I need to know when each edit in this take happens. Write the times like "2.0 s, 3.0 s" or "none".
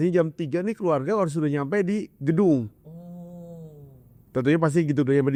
none